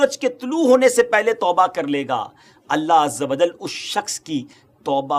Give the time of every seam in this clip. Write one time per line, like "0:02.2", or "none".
none